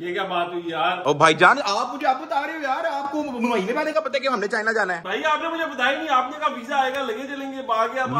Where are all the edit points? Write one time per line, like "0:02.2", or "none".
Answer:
none